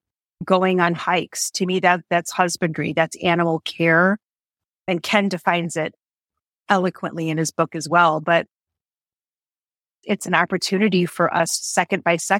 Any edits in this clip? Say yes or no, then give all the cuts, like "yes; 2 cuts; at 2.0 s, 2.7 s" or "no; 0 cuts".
yes; 1 cut; at 6.6 s